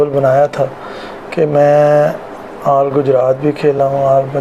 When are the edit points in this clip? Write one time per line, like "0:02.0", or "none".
none